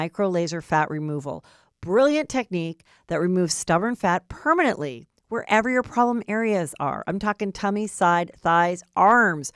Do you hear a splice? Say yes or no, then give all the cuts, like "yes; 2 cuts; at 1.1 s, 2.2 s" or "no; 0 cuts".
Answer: no; 0 cuts